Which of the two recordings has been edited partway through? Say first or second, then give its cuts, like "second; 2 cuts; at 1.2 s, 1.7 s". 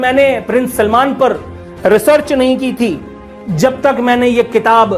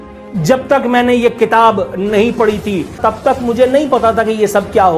second; 1 cut; at 3.0 s